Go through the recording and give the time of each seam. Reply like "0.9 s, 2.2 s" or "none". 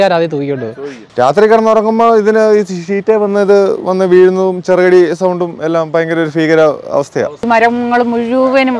1.0 s, 7.4 s